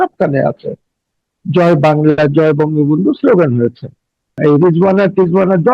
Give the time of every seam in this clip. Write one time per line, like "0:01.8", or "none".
0:04.4